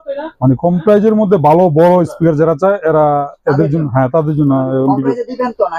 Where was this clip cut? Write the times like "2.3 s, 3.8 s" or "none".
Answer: none